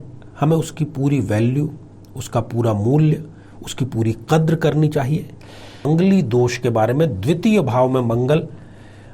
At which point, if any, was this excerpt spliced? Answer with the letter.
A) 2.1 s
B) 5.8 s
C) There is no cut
B